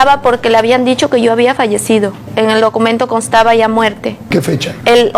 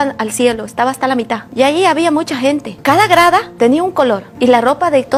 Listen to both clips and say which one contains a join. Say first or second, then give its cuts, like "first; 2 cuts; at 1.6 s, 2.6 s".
first; 1 cut; at 4.2 s